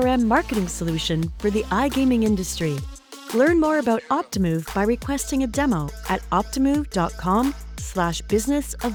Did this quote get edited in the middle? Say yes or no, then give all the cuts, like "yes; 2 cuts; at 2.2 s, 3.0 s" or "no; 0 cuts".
no; 0 cuts